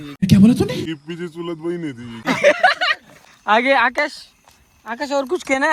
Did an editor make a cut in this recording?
no; 0 cuts

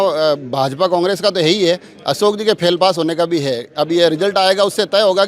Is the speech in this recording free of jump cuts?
yes; 0 cuts

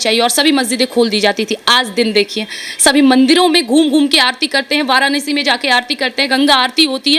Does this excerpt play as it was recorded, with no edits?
yes; 0 cuts

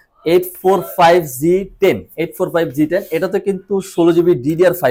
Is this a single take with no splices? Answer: yes; 0 cuts

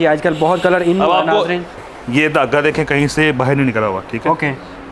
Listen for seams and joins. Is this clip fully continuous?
no; 1 cut; at 1.8 s

